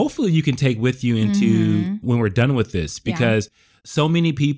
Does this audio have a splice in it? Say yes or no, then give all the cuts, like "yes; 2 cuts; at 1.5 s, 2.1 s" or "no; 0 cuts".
no; 0 cuts